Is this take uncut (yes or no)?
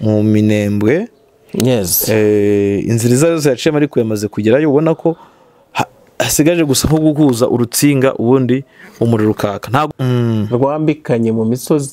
no